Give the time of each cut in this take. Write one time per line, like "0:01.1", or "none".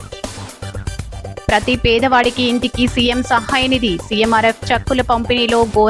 0:01.4

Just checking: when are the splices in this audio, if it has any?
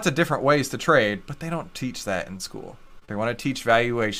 none

